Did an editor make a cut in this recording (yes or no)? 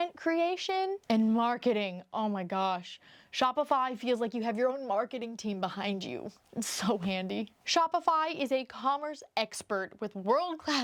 no